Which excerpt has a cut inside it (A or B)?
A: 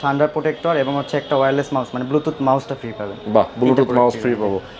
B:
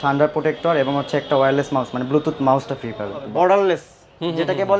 B